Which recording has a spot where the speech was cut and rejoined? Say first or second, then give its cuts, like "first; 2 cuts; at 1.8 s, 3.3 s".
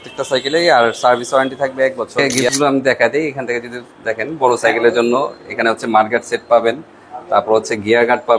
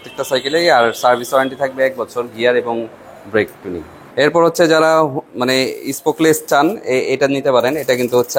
first; 1 cut; at 2.5 s